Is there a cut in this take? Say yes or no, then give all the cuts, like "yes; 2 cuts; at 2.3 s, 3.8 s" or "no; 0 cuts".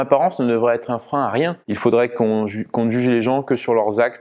yes; 1 cut; at 1.6 s